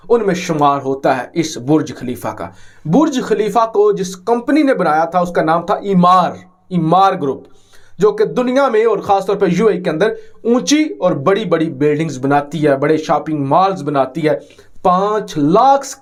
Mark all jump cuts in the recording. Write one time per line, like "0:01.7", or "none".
none